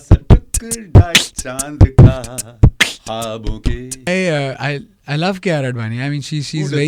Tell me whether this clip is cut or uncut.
cut